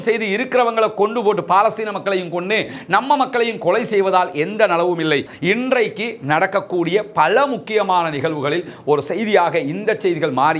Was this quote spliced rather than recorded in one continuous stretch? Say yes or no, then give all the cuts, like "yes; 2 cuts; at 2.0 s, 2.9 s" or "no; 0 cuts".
yes; 1 cut; at 5.3 s